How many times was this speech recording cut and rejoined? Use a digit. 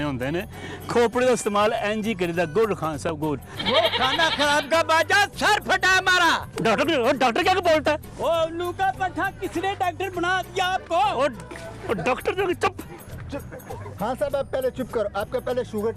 1